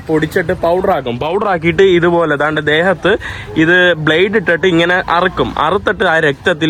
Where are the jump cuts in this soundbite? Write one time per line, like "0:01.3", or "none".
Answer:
none